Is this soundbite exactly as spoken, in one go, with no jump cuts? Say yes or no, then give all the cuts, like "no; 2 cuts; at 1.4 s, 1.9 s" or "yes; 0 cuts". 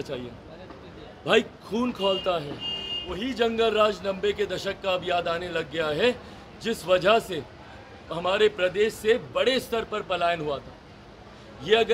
no; 1 cut; at 3.2 s